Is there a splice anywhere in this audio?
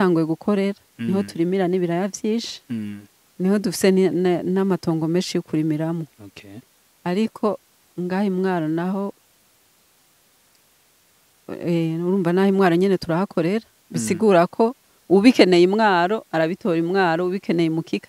no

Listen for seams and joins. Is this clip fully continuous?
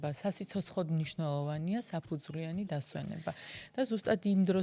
yes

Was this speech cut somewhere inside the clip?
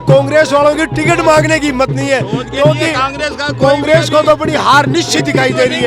no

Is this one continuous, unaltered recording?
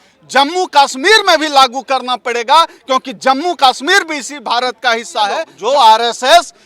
no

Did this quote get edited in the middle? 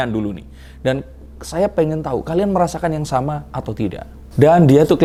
no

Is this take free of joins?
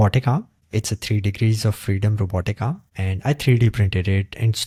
yes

